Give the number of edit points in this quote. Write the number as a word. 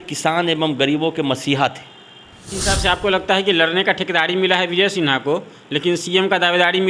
one